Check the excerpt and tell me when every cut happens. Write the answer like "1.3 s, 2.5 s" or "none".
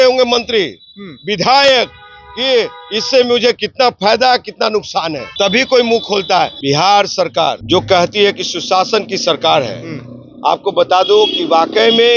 5.2 s, 6.6 s, 7.6 s